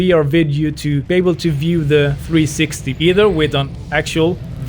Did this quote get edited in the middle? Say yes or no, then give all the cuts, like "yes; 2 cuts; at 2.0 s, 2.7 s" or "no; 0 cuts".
yes; 2 cuts; at 1.0 s, 2.2 s